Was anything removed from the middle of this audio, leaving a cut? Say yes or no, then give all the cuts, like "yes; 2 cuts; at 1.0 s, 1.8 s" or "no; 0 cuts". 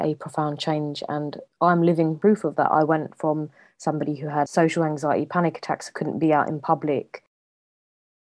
yes; 2 cuts; at 2.1 s, 4.5 s